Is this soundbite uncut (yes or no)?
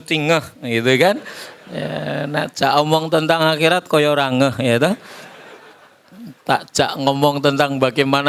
yes